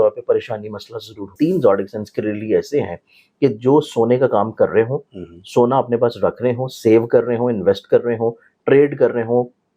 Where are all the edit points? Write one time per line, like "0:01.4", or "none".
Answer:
0:01.3